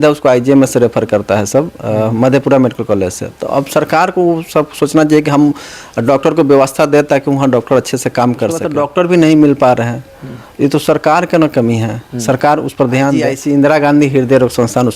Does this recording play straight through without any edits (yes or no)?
no